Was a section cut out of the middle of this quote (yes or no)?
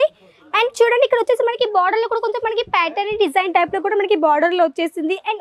no